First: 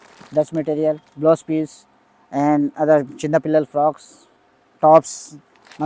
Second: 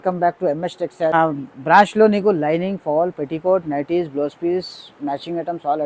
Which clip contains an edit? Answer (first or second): second